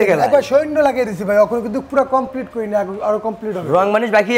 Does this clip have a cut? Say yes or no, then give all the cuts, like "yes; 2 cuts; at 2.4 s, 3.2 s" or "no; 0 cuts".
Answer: no; 0 cuts